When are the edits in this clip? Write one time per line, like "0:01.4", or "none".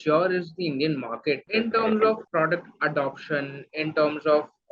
0:01.5
0:02.2